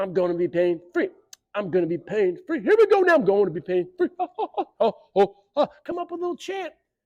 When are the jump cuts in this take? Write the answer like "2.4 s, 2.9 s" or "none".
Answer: none